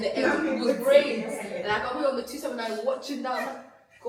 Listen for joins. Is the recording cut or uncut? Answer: uncut